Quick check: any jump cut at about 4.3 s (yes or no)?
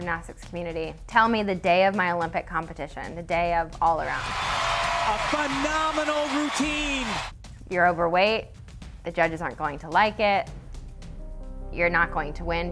yes